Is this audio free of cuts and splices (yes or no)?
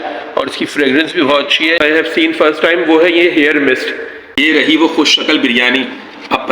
no